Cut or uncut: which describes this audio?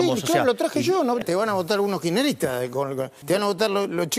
cut